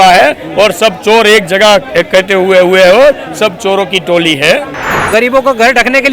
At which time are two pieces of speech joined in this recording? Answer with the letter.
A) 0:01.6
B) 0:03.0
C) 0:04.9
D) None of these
C